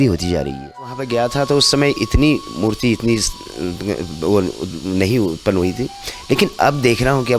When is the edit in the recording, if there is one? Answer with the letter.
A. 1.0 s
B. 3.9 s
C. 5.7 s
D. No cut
A